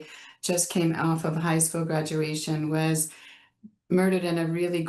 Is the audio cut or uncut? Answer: uncut